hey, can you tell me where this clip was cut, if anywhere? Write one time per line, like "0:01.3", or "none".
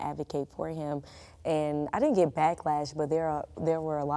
none